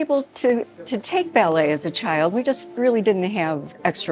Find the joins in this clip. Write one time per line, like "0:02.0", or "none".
none